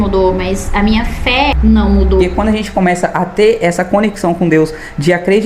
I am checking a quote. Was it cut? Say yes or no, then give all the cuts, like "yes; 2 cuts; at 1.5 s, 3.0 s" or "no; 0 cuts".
yes; 2 cuts; at 1.6 s, 2.3 s